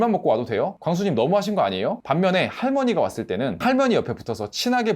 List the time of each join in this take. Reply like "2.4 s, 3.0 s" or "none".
2.0 s